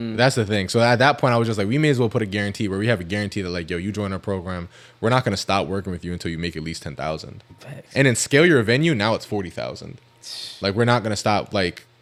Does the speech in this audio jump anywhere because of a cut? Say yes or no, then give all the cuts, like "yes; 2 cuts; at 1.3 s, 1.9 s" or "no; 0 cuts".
no; 0 cuts